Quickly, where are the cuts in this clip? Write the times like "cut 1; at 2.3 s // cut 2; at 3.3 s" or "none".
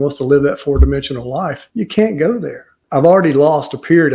cut 1; at 1.6 s // cut 2; at 2.8 s